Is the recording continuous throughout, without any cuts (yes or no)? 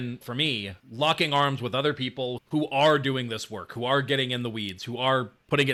yes